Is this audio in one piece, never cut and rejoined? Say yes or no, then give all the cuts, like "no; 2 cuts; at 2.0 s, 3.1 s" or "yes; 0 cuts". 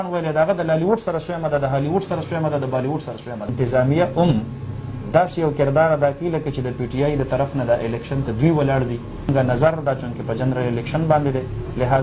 no; 2 cuts; at 3.5 s, 9.3 s